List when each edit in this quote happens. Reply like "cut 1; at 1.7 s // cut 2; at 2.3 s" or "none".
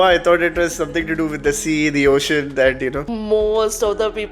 cut 1; at 3.1 s

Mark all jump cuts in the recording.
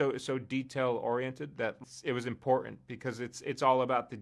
cut 1; at 1.8 s

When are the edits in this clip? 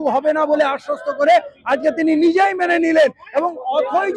none

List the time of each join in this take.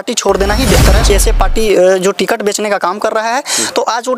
cut 1; at 1.1 s

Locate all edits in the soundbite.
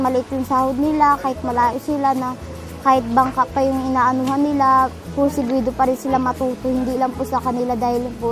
none

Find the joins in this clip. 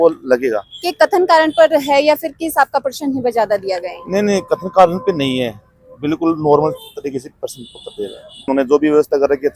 cut 1; at 8.4 s

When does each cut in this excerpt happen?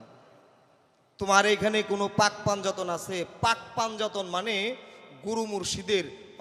none

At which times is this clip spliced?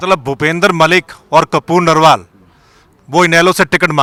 none

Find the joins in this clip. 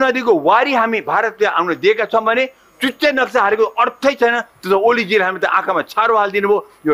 none

